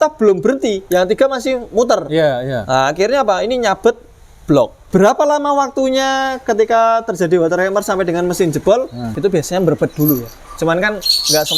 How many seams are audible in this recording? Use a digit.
2